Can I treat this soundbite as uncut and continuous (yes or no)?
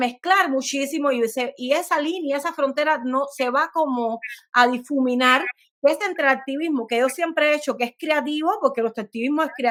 yes